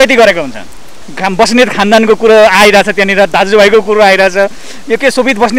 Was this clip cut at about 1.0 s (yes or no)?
yes